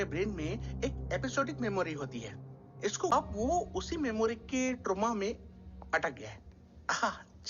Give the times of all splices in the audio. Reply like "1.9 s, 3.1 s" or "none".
3.1 s